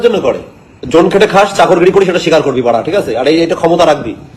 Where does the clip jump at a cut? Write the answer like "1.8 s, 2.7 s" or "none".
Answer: 0.9 s